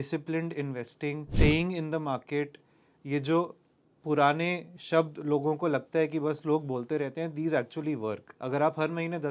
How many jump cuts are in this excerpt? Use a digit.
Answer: 2